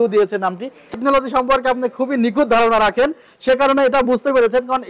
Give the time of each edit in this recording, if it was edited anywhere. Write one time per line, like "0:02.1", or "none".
0:01.0